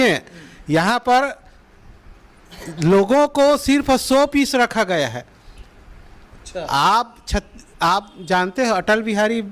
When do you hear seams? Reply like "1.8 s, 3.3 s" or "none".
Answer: none